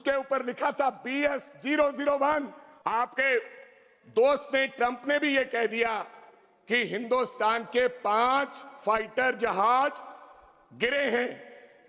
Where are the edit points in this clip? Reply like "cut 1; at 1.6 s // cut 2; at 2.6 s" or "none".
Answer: cut 1; at 2.6 s